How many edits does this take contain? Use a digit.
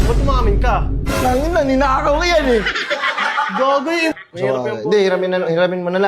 1